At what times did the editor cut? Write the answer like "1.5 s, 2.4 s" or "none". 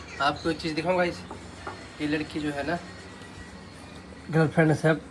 none